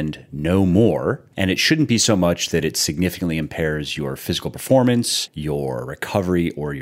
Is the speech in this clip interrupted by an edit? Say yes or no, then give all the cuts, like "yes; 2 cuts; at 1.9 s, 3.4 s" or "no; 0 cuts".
no; 0 cuts